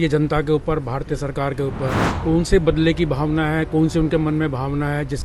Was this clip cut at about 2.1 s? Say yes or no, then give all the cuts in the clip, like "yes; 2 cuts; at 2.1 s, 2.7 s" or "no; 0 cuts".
yes; 1 cut; at 2.1 s